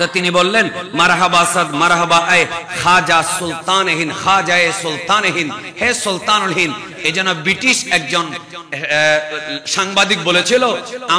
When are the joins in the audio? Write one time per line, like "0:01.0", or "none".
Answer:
none

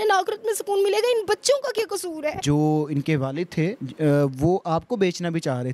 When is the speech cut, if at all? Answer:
0:02.4

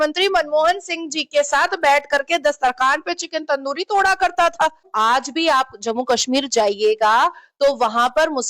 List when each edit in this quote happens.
0:04.9

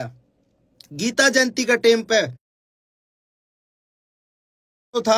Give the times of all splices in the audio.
none

